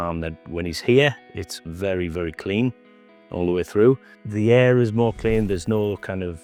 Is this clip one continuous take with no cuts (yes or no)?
yes